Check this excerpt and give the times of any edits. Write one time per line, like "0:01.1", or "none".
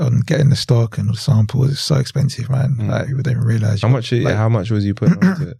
none